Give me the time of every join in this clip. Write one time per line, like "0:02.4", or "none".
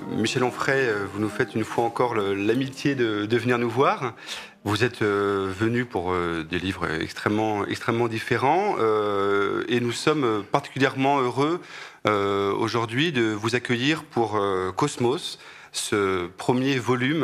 none